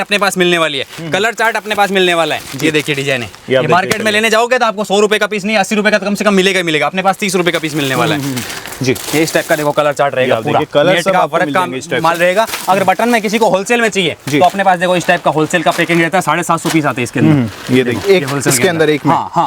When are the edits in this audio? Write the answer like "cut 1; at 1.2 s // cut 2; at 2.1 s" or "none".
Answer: none